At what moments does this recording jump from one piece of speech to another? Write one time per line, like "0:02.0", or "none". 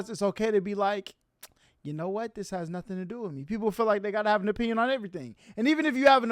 none